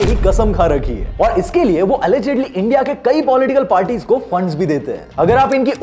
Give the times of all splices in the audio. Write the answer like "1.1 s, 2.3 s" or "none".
none

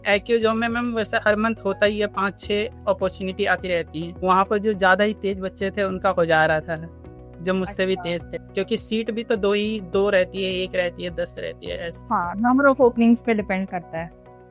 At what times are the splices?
4.0 s, 8.4 s

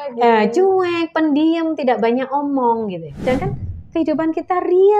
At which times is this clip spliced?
3.2 s

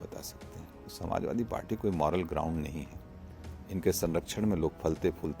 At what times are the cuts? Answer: 0.9 s

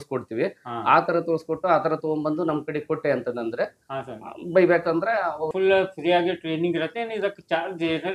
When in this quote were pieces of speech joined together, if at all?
5.5 s

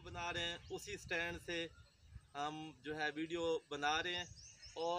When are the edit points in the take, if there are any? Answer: none

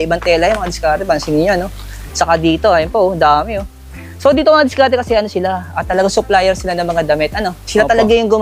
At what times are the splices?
none

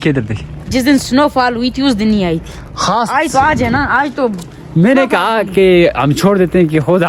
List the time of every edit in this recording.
none

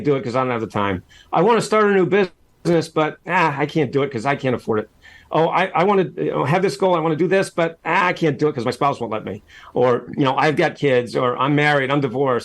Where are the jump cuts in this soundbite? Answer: 2.5 s

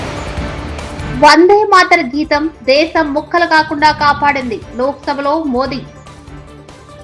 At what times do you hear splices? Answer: 1.0 s

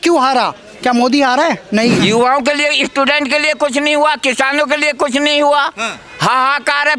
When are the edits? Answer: 2.0 s

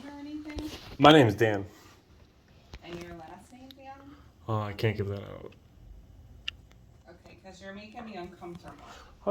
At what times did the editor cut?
none

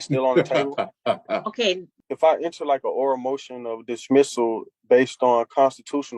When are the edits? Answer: 1.9 s

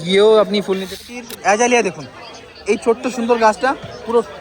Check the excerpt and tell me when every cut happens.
1.0 s

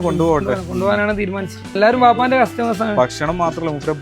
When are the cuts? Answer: 1.8 s

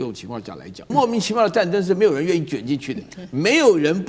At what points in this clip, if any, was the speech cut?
0.9 s

